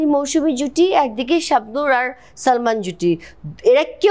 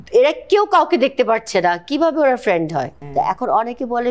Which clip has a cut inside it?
second; 1 cut; at 3.0 s

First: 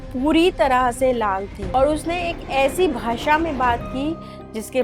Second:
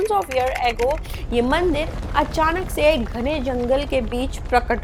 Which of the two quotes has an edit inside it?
first; 1 cut; at 1.5 s

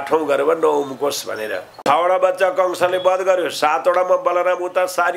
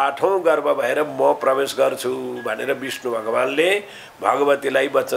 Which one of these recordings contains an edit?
first; 1 cut; at 1.7 s

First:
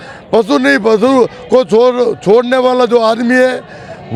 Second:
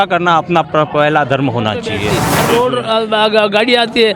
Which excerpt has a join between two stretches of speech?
second; 1 cut; at 2.3 s

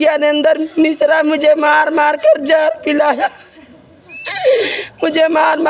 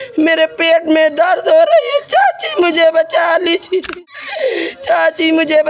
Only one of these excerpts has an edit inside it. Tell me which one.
second; 1 cut; at 4.0 s

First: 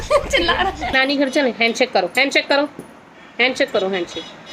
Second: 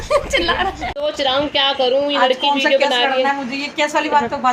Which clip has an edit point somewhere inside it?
first; 1 cut; at 0.9 s

